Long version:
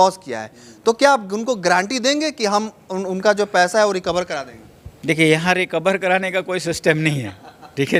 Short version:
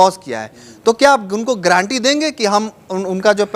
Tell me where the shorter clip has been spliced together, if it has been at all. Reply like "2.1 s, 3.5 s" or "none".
none